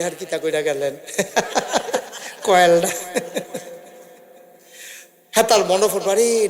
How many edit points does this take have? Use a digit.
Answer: 0